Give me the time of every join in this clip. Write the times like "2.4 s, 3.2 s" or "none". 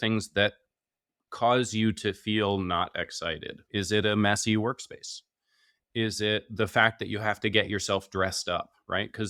none